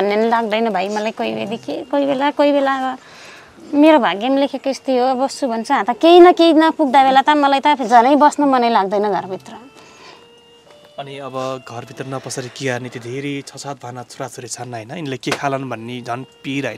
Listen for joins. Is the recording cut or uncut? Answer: uncut